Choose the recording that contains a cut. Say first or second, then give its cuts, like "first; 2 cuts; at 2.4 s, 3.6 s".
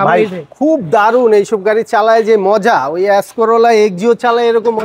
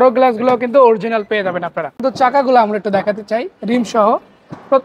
second; 1 cut; at 2.0 s